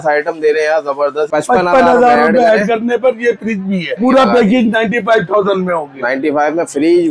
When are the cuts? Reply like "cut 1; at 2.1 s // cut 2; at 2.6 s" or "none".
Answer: cut 1; at 1.3 s // cut 2; at 4.0 s

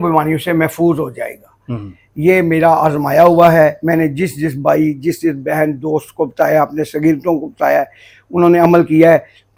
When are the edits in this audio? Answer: none

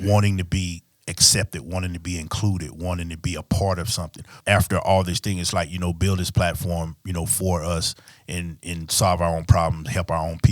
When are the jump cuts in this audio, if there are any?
cut 1; at 4.4 s

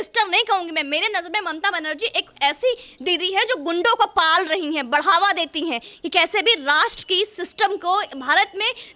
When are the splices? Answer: none

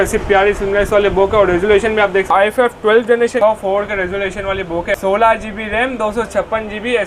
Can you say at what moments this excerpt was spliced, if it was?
cut 1; at 2.3 s // cut 2; at 3.4 s // cut 3; at 5.0 s

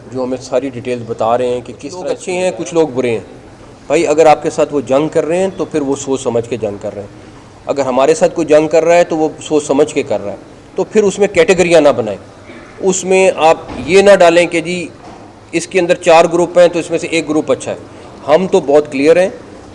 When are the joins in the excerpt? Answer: cut 1; at 2.0 s

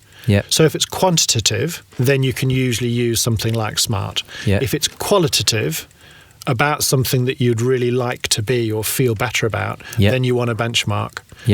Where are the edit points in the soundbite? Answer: cut 1; at 1.9 s

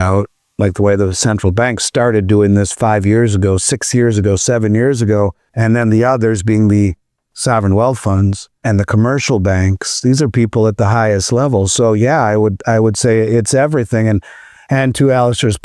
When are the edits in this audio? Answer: cut 1; at 5.5 s // cut 2; at 8.6 s

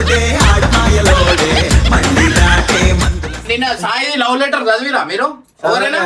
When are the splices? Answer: cut 1; at 3.3 s

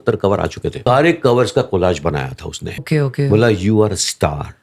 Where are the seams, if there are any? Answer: cut 1; at 0.8 s // cut 2; at 2.8 s

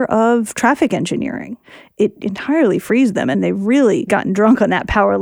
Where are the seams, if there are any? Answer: cut 1; at 2.0 s // cut 2; at 3.3 s // cut 3; at 4.1 s

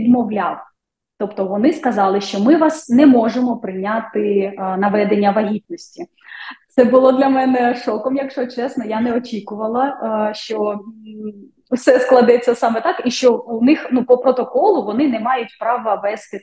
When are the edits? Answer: none

